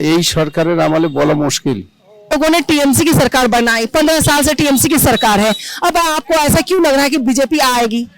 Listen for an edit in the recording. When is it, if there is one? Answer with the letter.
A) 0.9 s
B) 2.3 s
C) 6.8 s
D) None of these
B